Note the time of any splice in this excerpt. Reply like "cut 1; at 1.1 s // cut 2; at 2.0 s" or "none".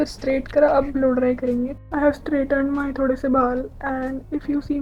cut 1; at 1.8 s